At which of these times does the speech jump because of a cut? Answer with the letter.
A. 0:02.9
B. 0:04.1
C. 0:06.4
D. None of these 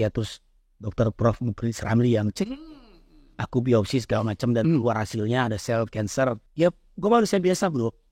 C